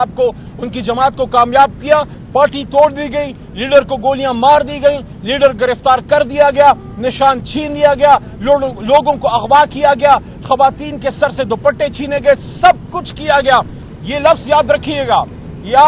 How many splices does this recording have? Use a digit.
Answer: 2